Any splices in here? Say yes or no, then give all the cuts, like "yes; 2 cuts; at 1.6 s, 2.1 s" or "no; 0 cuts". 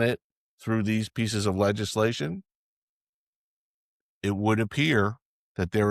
no; 0 cuts